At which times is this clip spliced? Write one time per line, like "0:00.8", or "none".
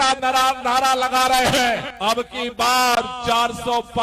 0:01.9